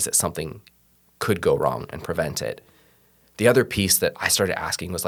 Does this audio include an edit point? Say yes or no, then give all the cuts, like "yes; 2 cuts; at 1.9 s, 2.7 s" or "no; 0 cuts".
no; 0 cuts